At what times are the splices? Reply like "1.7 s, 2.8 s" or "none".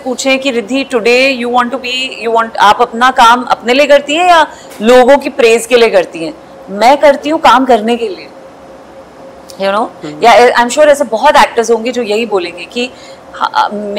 none